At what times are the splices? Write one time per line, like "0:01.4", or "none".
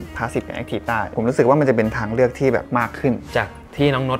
0:01.1
0:03.0